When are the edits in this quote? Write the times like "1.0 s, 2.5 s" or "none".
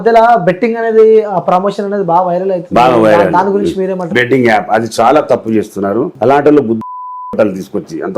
4.1 s, 6.1 s

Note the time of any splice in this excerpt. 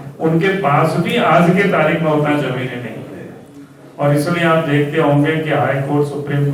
none

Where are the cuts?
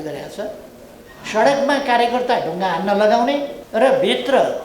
3.6 s

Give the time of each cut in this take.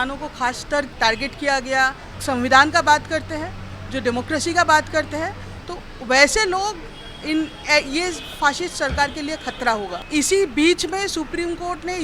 0.9 s, 2.1 s, 10.0 s

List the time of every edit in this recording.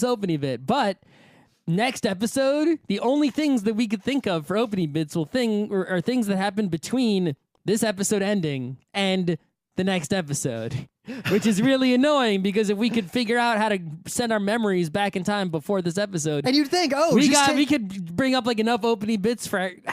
10.0 s

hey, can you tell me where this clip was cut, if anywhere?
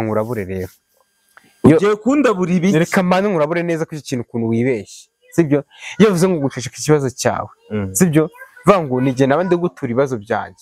none

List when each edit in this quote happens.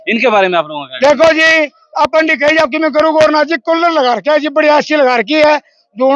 none

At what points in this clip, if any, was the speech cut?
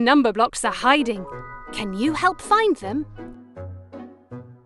3.1 s

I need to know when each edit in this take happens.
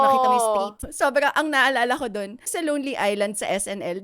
0.8 s, 2.5 s

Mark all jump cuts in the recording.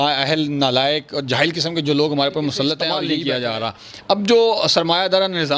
3.1 s

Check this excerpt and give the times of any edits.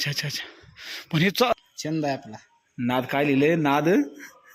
1.5 s

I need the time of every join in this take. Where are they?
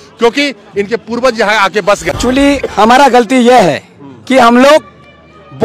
2.1 s

